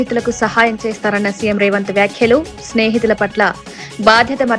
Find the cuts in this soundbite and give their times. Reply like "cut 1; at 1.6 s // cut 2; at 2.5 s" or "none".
none